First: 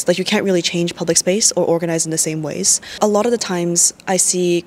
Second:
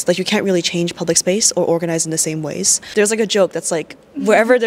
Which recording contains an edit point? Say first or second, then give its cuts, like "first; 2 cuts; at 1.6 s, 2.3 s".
second; 1 cut; at 2.8 s